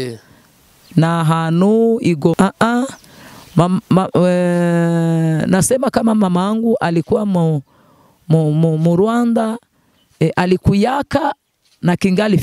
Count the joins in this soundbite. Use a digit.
1